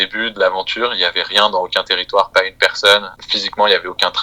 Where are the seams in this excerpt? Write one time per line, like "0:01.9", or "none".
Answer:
0:03.1